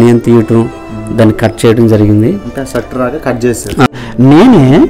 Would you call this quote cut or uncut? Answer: cut